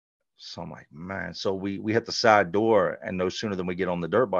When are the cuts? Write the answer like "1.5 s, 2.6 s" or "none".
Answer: none